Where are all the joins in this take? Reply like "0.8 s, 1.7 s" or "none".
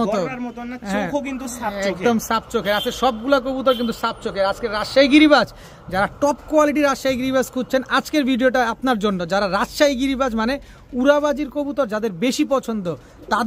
none